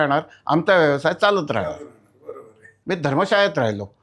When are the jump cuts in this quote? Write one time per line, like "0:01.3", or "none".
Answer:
0:02.7